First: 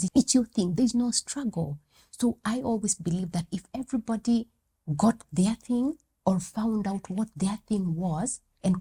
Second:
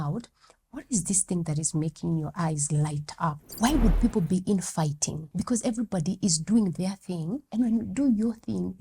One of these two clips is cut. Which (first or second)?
second